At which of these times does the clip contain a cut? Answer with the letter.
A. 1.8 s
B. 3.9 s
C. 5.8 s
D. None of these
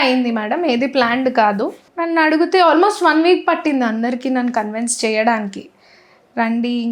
A